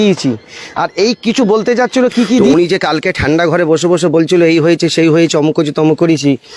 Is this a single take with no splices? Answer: no; 1 cut; at 2.5 s

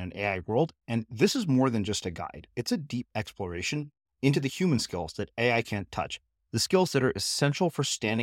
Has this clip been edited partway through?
no; 0 cuts

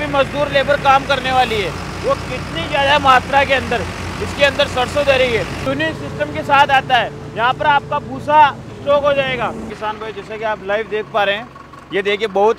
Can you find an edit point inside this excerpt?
yes; 2 cuts; at 5.6 s, 9.7 s

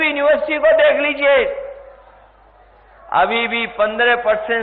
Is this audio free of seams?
yes; 0 cuts

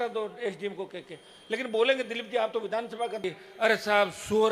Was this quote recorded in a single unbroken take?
no; 1 cut; at 3.2 s

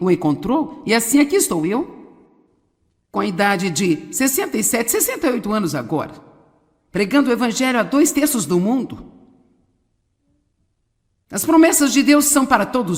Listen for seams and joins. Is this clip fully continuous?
no; 1 cut; at 5.1 s

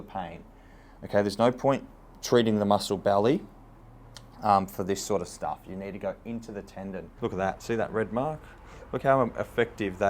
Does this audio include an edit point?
yes; 1 cut; at 7.1 s

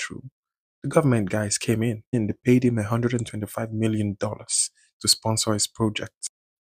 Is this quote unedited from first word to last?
no; 1 cut; at 2.1 s

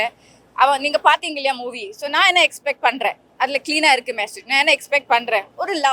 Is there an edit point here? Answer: no; 0 cuts

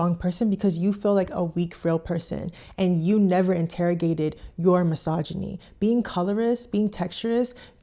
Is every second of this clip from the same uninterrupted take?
yes; 0 cuts

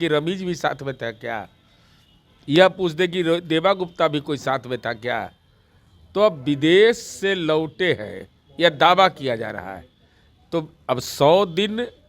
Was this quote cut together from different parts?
no; 0 cuts

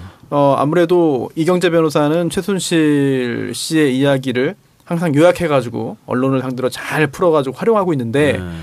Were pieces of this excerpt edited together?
yes; 1 cut; at 6.8 s

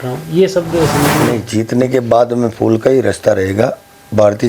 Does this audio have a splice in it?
yes; 1 cut; at 1.2 s

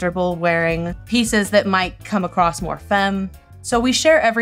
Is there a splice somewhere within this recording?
yes; 2 cuts; at 1.0 s, 3.4 s

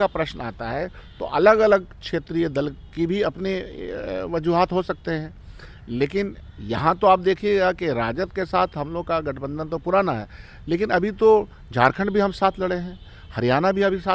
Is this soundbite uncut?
yes; 0 cuts

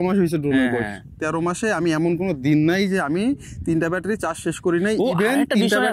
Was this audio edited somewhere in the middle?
no; 0 cuts

